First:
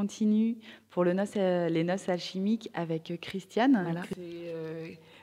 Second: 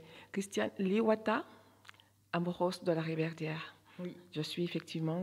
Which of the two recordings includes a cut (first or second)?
first